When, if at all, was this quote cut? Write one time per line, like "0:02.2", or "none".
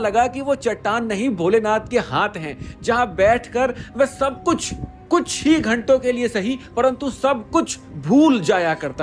none